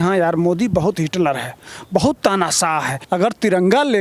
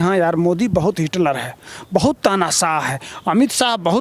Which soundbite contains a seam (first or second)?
first